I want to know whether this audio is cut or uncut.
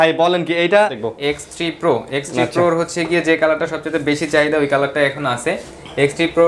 cut